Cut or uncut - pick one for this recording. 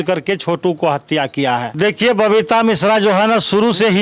cut